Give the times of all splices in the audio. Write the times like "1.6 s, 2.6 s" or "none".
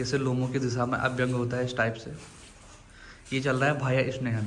none

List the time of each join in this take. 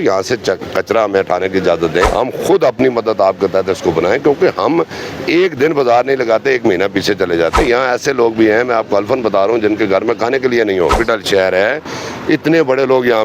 2.1 s, 7.6 s, 10.9 s

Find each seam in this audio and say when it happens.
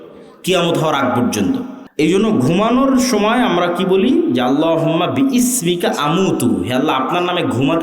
1.8 s

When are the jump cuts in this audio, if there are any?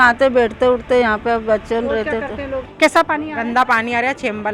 2.7 s

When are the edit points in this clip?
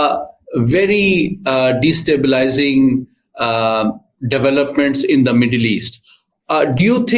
none

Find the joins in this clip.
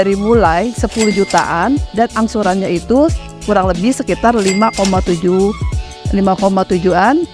none

